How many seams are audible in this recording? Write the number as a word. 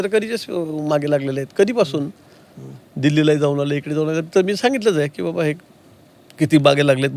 zero